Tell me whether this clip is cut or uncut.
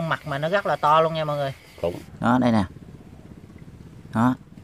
cut